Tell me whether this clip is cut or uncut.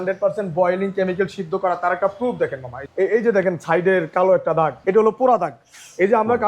cut